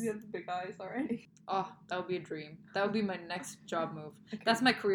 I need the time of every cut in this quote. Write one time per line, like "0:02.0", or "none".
0:01.3